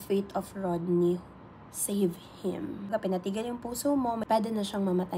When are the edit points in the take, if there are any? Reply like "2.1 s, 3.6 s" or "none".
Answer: 2.9 s, 4.2 s